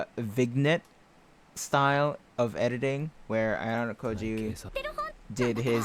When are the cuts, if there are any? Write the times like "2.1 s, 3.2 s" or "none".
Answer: none